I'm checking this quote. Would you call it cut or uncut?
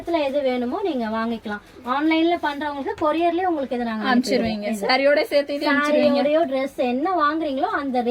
uncut